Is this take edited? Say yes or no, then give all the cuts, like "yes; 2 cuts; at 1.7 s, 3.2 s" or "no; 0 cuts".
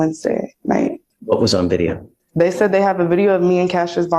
yes; 1 cut; at 1.1 s